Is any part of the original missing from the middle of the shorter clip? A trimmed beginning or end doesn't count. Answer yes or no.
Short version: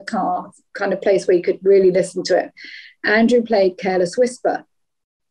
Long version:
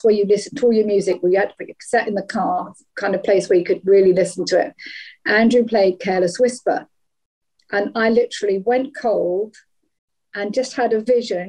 no